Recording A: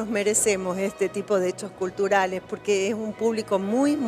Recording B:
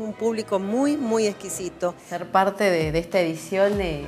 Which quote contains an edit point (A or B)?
B